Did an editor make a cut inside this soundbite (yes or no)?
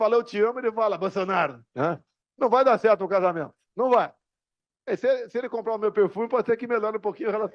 no